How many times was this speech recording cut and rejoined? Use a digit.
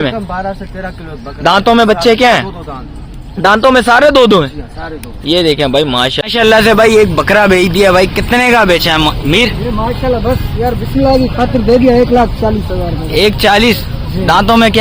1